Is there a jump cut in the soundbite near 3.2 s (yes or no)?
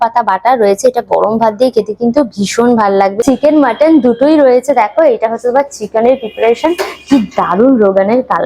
yes